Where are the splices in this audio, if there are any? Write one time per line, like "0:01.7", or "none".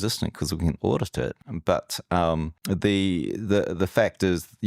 0:01.5
0:02.5